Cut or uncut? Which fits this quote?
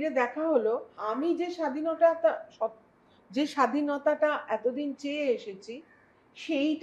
cut